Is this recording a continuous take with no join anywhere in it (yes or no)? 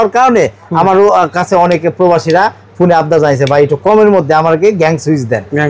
yes